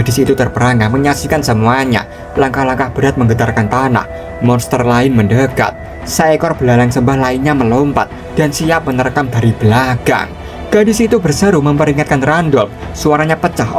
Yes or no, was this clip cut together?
yes